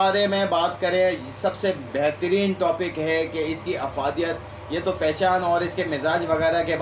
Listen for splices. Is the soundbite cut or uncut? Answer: uncut